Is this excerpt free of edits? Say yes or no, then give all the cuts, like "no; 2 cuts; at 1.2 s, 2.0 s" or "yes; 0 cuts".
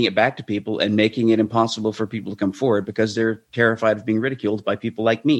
yes; 0 cuts